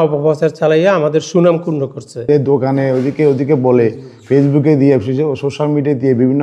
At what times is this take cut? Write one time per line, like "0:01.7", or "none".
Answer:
0:02.3